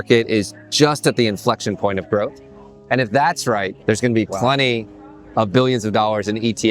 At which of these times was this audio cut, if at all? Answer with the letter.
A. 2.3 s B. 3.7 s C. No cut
B